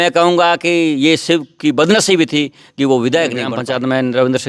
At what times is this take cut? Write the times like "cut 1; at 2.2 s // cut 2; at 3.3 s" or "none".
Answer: cut 1; at 3.5 s